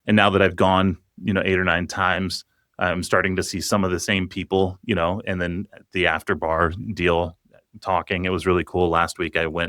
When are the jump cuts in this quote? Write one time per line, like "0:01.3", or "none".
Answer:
none